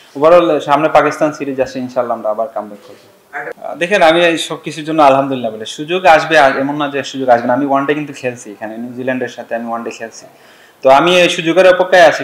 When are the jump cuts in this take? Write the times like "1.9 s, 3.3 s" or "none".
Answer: 3.5 s